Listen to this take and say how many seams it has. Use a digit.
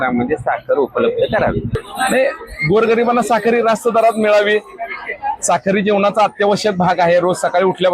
1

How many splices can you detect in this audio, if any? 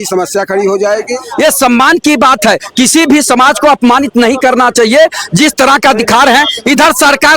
1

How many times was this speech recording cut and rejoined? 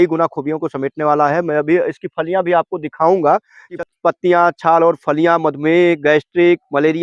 1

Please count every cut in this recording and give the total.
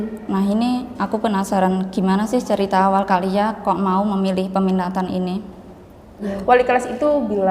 1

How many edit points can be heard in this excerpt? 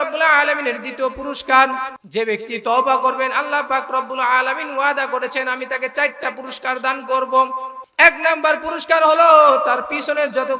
2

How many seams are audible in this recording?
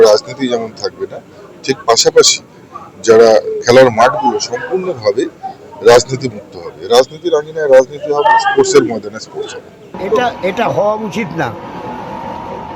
0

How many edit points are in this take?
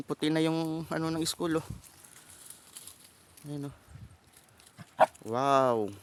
0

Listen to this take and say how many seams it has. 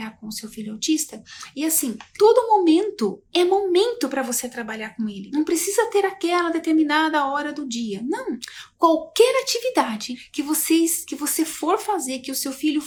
0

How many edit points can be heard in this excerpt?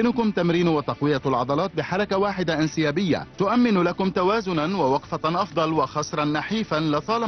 1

